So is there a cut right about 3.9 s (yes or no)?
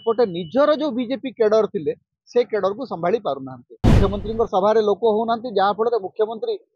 yes